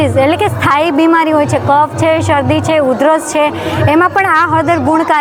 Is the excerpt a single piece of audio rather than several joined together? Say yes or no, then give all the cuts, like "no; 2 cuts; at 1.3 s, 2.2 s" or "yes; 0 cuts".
yes; 0 cuts